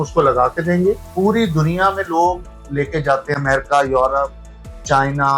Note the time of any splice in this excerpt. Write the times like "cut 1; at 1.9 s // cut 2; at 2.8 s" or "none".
cut 1; at 1.1 s